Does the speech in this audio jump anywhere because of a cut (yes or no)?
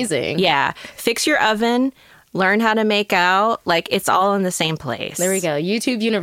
no